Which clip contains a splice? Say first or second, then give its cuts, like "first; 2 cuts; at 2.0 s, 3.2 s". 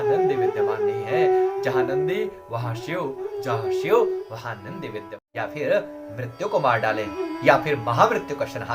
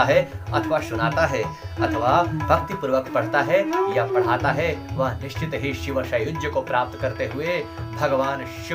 first; 1 cut; at 5.2 s